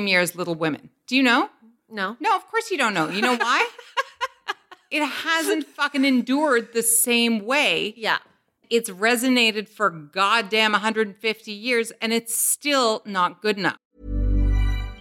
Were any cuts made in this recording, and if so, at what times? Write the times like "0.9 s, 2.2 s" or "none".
8.6 s, 13.9 s